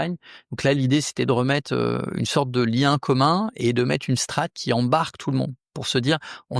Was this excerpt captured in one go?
yes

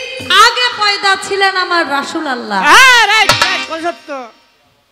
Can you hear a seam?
no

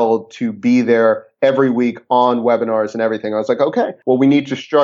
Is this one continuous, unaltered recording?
yes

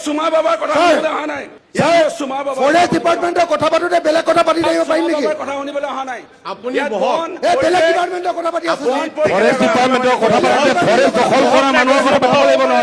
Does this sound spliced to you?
no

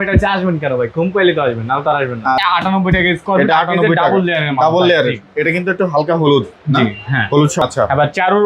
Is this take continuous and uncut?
no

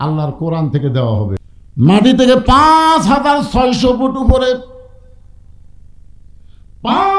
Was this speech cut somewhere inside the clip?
yes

